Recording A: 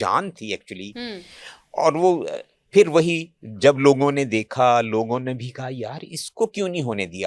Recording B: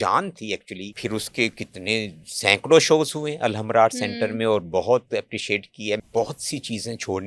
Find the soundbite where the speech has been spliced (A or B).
B